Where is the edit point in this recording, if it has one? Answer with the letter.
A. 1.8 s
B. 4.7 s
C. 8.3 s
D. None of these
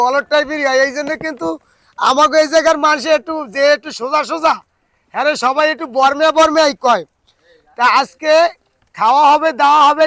D